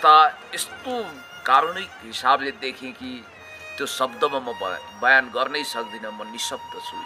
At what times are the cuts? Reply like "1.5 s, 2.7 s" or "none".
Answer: none